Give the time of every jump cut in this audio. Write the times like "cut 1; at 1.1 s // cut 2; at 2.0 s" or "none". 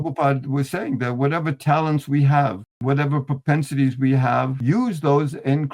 cut 1; at 2.7 s // cut 2; at 4.6 s